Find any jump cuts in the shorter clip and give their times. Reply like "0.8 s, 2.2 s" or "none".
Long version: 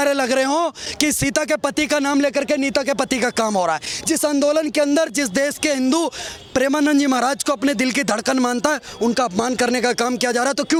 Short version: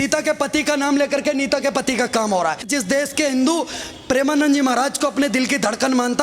2.7 s